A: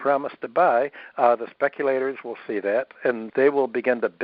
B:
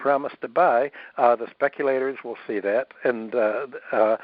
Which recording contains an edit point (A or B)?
A